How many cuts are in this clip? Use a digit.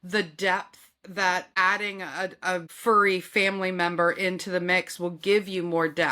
1